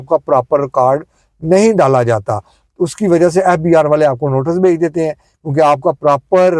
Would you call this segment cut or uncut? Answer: uncut